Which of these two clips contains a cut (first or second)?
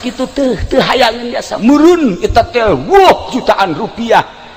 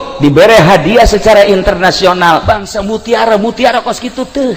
second